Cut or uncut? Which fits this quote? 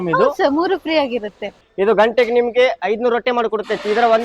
cut